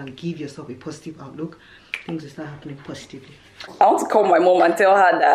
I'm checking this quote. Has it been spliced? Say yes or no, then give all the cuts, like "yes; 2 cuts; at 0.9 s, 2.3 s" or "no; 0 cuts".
yes; 1 cut; at 3.6 s